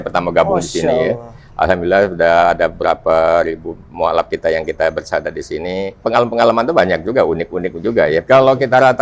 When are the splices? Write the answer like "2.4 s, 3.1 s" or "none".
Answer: 6.0 s, 8.2 s